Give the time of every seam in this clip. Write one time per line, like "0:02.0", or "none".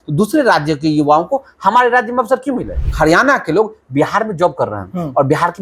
0:02.8